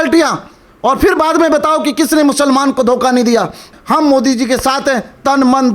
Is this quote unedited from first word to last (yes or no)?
no